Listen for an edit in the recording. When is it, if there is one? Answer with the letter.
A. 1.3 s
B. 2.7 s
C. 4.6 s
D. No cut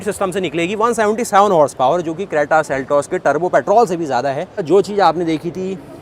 C